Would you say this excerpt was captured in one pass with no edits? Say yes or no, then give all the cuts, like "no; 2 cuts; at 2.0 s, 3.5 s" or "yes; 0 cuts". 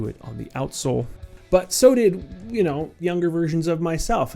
no; 1 cut; at 1.2 s